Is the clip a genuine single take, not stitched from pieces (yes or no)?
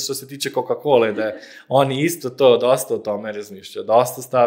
yes